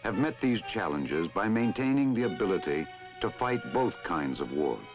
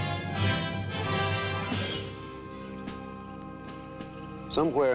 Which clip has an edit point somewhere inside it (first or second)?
first